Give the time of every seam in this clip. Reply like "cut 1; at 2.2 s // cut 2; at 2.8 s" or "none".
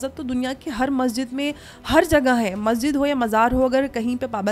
none